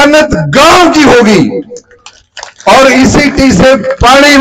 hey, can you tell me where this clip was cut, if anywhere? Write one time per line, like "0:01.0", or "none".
none